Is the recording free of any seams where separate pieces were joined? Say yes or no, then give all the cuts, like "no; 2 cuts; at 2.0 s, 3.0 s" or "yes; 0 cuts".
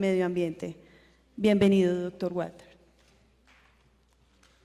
yes; 0 cuts